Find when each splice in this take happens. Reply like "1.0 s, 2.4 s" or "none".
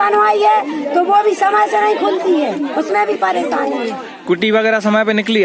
4.0 s